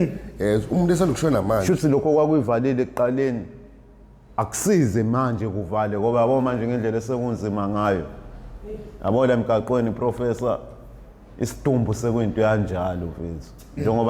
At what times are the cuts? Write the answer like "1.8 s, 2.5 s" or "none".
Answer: 1.6 s